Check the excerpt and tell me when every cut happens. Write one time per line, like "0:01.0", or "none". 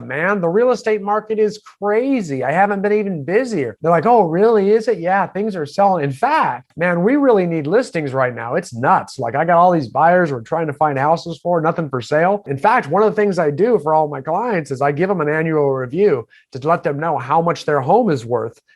0:03.7
0:06.6
0:12.5